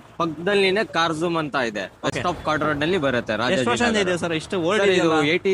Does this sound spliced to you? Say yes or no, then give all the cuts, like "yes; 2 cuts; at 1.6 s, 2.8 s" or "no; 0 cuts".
no; 0 cuts